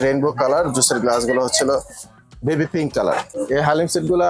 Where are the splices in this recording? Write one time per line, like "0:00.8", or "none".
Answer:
0:03.3